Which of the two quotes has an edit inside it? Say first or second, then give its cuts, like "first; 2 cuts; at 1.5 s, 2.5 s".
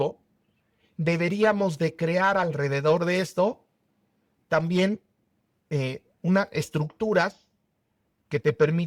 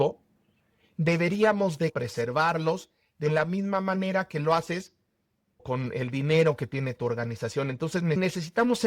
second; 3 cuts; at 1.9 s, 5.6 s, 8.2 s